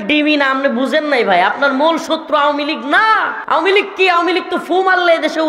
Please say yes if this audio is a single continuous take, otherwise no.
no